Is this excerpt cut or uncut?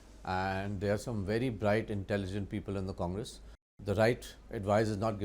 cut